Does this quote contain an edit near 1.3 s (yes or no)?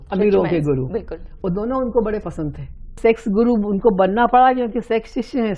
no